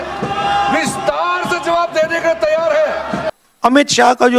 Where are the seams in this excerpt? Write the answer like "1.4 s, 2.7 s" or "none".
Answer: 3.2 s